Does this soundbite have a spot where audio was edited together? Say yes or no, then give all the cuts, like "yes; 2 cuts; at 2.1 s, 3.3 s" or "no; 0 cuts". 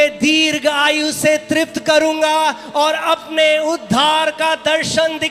no; 0 cuts